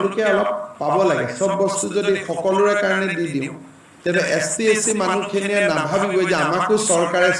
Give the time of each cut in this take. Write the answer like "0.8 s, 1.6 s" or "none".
none